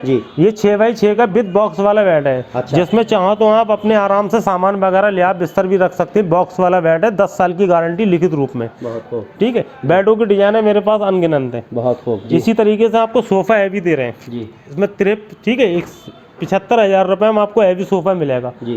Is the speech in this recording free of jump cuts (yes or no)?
yes